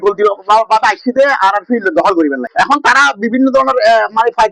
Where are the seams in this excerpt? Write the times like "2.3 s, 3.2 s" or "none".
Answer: 2.4 s